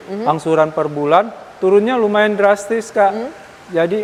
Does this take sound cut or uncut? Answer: uncut